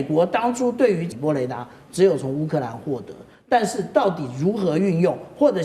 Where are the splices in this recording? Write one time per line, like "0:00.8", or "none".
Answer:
0:01.1